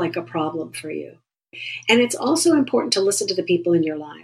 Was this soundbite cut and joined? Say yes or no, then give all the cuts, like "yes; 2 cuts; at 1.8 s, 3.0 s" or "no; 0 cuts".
yes; 1 cut; at 1.7 s